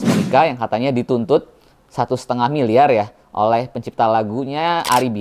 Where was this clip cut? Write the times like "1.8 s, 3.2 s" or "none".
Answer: none